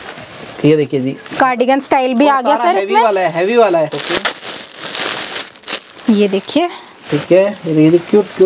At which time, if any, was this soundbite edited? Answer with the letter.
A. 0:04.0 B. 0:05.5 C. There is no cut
A